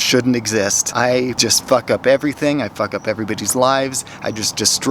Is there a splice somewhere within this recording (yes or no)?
yes